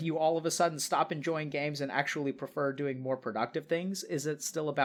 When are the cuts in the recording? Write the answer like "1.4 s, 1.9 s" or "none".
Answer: none